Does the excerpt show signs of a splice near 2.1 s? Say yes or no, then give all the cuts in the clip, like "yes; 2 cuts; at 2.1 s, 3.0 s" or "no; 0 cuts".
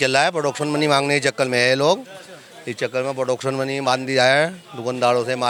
no; 0 cuts